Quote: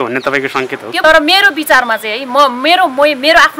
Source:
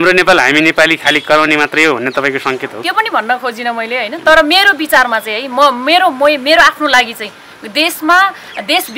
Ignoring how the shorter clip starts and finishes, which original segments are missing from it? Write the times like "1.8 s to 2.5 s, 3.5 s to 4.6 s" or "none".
2.8 s to 4.2 s